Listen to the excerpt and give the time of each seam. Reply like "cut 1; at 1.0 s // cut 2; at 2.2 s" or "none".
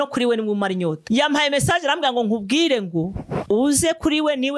none